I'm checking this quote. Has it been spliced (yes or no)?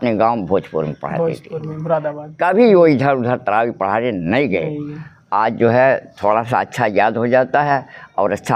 no